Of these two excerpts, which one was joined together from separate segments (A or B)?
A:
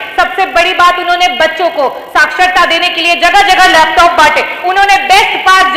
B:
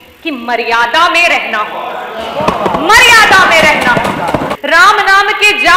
B